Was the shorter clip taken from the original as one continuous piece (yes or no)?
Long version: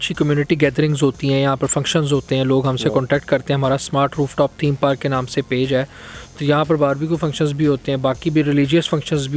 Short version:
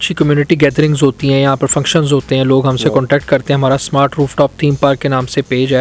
yes